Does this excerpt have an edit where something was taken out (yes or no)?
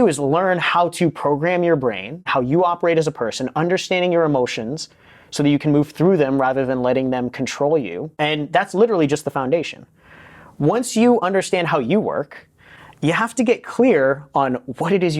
yes